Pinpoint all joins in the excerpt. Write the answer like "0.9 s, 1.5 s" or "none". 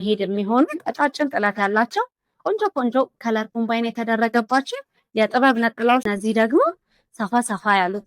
6.1 s